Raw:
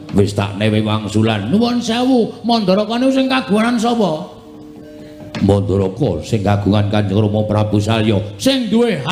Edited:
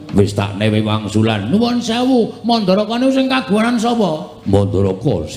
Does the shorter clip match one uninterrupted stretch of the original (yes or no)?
no